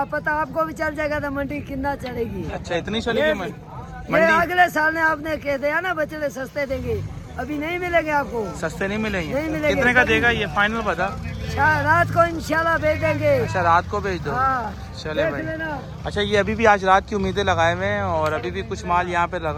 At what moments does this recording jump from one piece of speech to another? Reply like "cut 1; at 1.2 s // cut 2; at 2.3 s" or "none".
none